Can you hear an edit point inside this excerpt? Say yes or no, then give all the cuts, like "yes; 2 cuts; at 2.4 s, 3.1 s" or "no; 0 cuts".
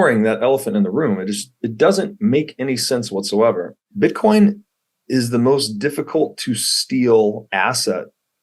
yes; 1 cut; at 3.8 s